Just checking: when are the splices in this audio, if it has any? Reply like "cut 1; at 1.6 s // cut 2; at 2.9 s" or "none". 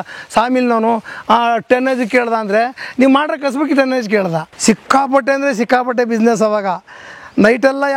cut 1; at 4.5 s